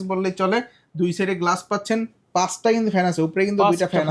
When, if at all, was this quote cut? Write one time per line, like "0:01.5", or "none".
none